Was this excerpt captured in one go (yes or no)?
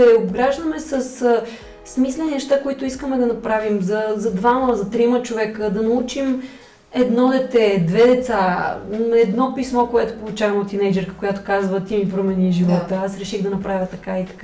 yes